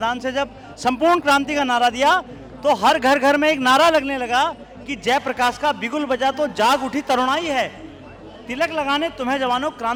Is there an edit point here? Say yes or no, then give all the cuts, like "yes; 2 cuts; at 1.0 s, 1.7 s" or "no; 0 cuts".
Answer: no; 0 cuts